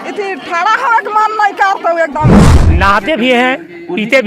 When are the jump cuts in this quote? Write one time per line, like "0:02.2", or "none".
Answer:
0:02.5